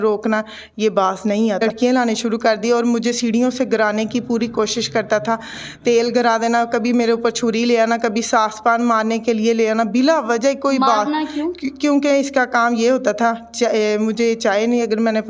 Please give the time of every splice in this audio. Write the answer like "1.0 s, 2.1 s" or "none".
1.6 s